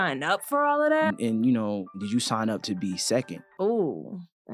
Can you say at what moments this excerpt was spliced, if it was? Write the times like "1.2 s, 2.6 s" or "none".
1.1 s, 2.0 s, 3.4 s